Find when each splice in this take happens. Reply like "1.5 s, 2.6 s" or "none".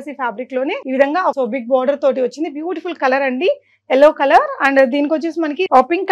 none